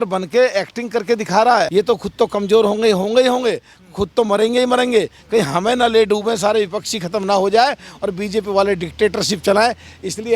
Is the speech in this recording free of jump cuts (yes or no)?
no